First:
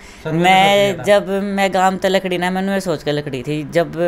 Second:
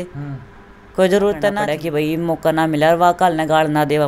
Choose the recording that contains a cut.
second; 1 cut; at 1.6 s

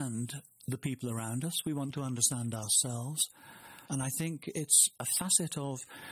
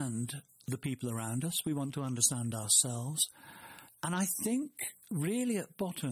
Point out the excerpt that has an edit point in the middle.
first; 1 cut; at 3.7 s

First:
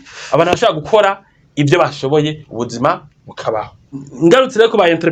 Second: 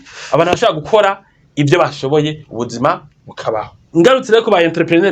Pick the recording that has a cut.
second; 1 cut; at 3.8 s

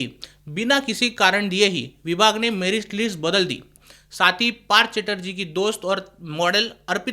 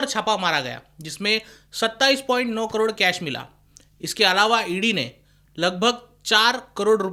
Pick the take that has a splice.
first; 1 cut; at 3.6 s

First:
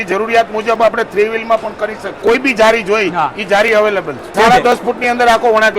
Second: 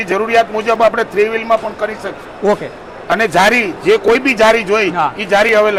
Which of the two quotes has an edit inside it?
first; 2 cuts; at 2.2 s, 4.3 s

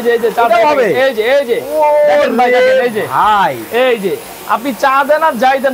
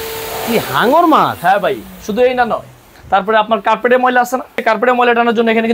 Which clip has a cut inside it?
second; 1 cut; at 4.6 s

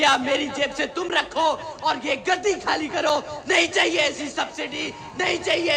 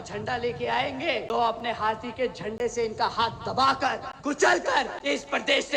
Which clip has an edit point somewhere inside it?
second; 3 cuts; at 1.3 s, 4.1 s, 4.9 s

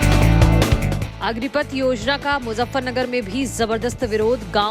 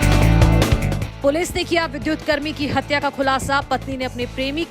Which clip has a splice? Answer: first; 1 cut; at 0.9 s

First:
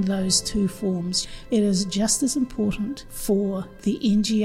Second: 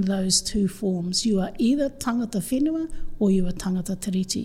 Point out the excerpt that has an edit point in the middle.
first; 2 cuts; at 1.2 s, 3.1 s

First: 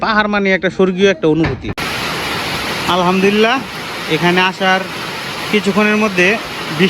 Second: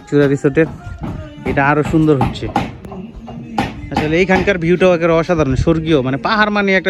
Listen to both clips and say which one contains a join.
first; 1 cut; at 1.8 s

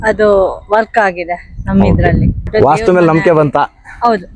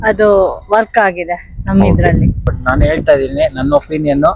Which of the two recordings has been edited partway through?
second; 1 cut; at 2.4 s

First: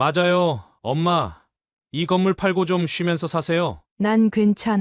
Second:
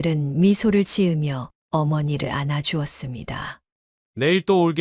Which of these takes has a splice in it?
first; 1 cut; at 3.8 s

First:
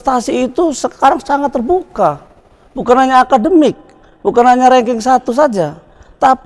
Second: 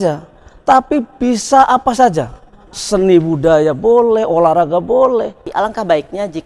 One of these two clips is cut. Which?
second; 1 cut; at 5.4 s

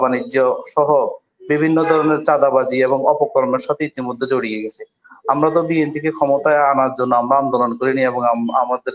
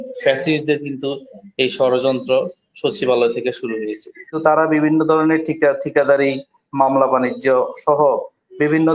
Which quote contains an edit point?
second; 1 cut; at 4.3 s

